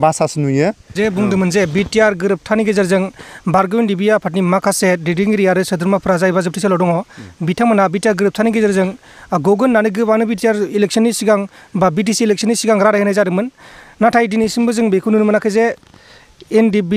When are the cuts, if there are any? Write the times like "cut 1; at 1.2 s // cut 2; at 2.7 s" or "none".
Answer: cut 1; at 0.9 s